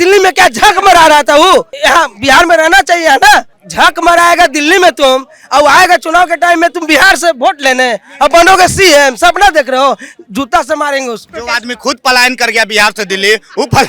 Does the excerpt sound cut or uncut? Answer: cut